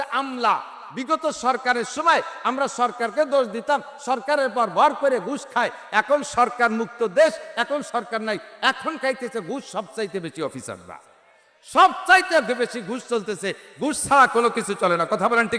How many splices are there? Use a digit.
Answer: 0